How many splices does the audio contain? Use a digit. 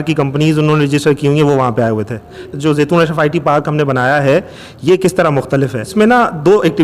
2